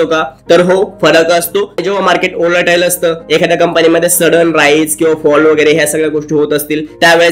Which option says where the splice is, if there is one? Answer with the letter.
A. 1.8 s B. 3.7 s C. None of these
A